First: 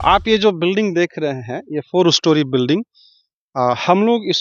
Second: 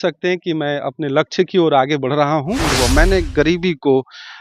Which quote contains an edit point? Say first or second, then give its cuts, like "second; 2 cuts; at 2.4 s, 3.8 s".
second; 1 cut; at 2.7 s